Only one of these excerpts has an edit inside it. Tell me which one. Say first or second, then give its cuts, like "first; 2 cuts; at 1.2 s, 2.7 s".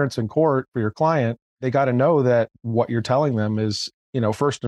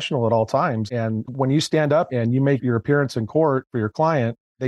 second; 2 cuts; at 0.9 s, 2.1 s